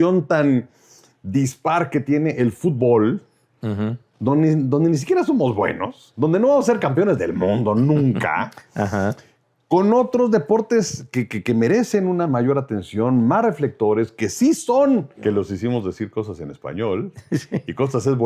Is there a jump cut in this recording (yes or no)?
yes